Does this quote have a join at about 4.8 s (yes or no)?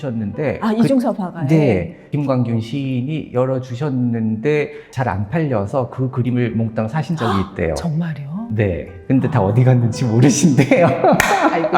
no